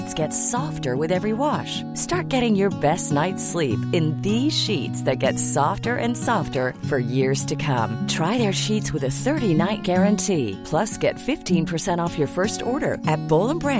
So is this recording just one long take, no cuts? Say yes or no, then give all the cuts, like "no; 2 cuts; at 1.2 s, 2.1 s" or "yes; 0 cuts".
yes; 0 cuts